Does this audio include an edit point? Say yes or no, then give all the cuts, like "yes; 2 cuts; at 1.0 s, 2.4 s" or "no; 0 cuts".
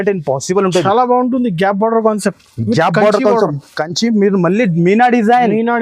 no; 0 cuts